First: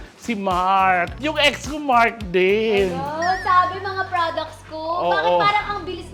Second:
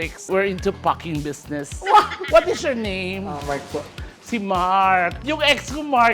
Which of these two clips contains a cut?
second; 1 cut; at 2.2 s

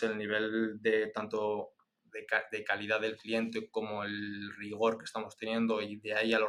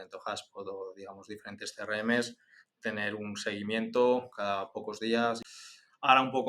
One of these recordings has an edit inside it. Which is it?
second; 1 cut; at 5.6 s

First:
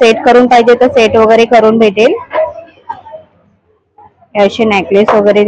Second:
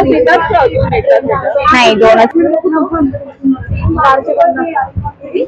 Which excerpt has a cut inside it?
second; 1 cut; at 2.3 s

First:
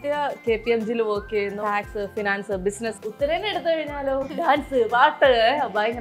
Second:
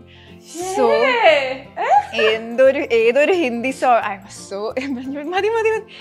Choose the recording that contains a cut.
first; 3 cuts; at 1.6 s, 3.0 s, 4.3 s

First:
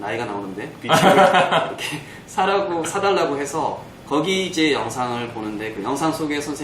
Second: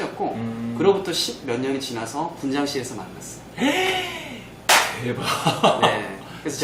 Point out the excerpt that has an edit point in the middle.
first; 1 cut; at 3.8 s

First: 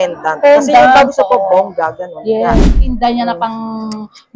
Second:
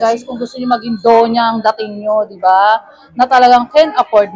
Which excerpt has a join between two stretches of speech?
first; 1 cut; at 2.7 s

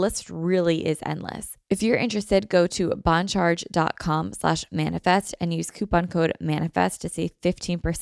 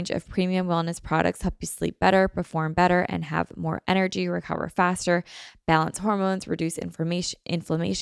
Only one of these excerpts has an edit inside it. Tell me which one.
first; 1 cut; at 1.5 s

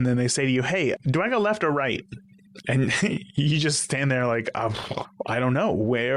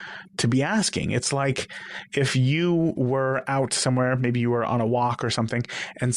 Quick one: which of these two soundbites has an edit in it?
first; 1 cut; at 5.0 s

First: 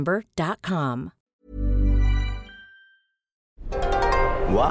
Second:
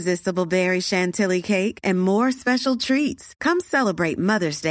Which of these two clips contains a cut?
first; 1 cut; at 3.7 s

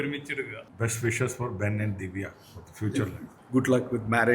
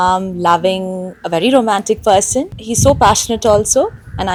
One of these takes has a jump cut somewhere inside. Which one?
first; 1 cut; at 3.4 s

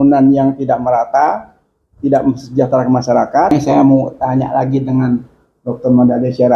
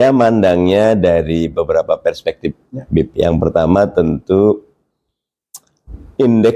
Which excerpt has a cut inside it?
first; 1 cut; at 3.5 s

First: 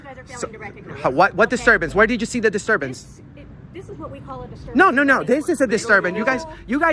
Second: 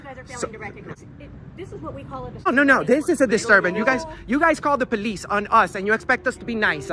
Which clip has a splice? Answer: second; 2 cuts; at 0.9 s, 2.5 s

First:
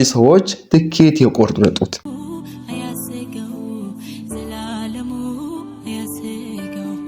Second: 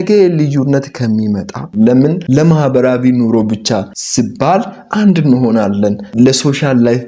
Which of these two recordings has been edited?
first; 1 cut; at 1.9 s

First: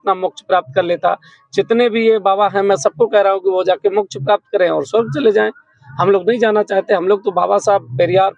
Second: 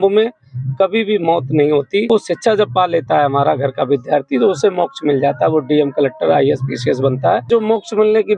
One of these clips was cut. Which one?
second; 2 cuts; at 2.1 s, 7.5 s

